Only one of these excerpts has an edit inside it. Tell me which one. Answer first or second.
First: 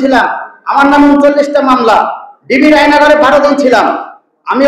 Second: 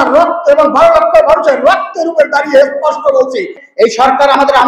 second